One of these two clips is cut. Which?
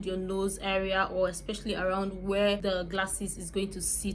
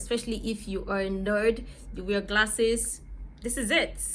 first; 1 cut; at 2.6 s

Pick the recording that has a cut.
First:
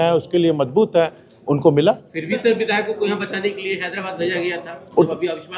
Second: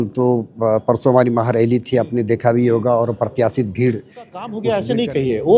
second; 1 cut; at 4.6 s

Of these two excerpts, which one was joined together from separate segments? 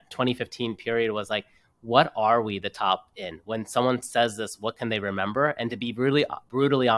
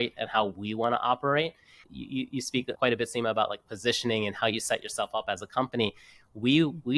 second; 1 cut; at 1.7 s

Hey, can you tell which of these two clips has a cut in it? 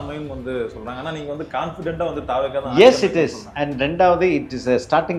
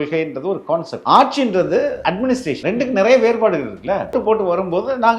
second; 3 cuts; at 0.9 s, 2.3 s, 4.1 s

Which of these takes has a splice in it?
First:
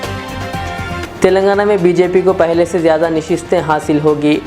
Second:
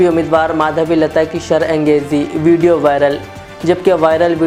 first; 1 cut; at 1.0 s

